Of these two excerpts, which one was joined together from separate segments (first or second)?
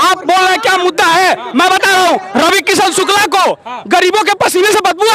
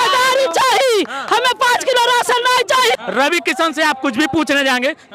second